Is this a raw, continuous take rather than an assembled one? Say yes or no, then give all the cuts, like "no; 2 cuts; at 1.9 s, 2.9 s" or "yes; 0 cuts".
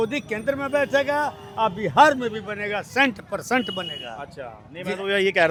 yes; 0 cuts